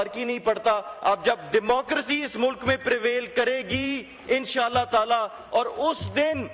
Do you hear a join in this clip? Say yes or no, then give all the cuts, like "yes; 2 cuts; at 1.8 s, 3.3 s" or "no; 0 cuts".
no; 0 cuts